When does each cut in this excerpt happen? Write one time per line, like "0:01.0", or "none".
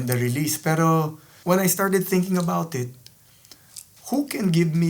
0:01.3

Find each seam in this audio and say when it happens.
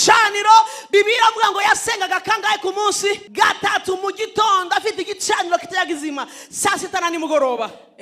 0:03.3

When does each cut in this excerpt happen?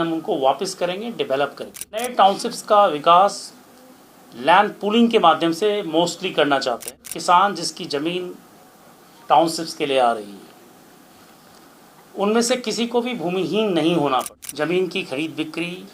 0:02.1
0:07.1
0:14.4

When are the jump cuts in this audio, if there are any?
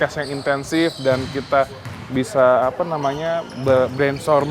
none

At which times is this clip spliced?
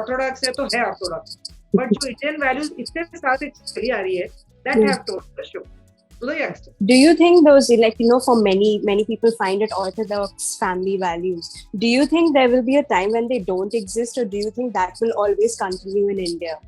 none

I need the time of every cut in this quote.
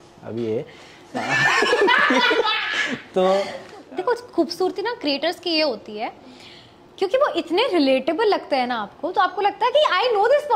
0:03.8

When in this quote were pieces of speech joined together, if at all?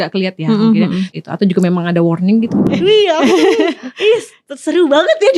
0:01.1
0:02.6

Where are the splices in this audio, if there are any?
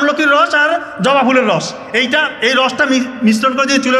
none

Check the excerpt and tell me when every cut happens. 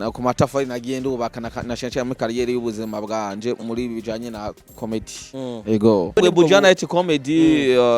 0:06.2

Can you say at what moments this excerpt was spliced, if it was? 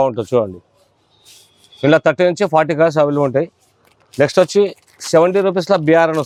none

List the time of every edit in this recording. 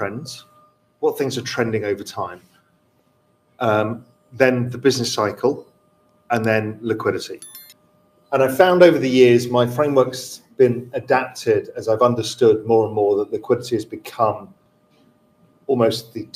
none

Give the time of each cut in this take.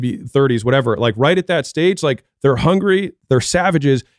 0:03.1

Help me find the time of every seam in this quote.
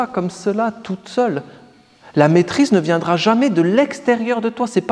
none

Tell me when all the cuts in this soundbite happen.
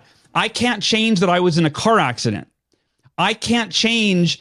none

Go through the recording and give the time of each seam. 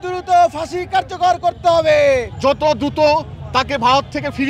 0:02.3

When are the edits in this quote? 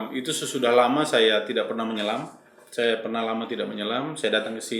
none

